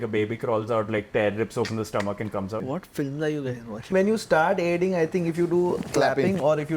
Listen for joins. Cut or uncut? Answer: cut